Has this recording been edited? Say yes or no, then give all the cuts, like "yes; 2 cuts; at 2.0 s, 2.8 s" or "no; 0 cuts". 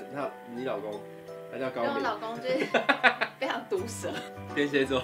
no; 0 cuts